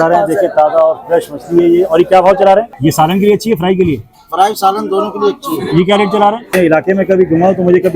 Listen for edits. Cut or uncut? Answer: cut